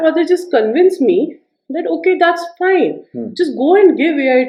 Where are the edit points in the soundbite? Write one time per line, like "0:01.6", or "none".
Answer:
none